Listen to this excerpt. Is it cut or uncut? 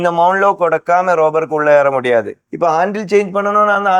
cut